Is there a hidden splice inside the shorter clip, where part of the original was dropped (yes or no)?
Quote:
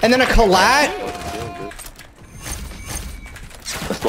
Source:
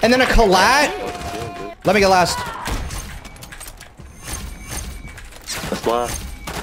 yes